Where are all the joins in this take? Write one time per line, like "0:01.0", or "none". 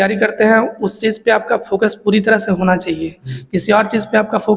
none